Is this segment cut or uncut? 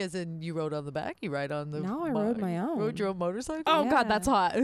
uncut